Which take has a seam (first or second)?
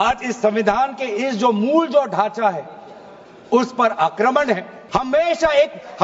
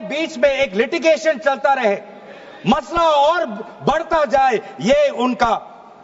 first